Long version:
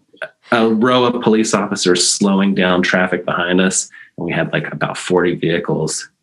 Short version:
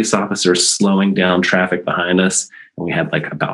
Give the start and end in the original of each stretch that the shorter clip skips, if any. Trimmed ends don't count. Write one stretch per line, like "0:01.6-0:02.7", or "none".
none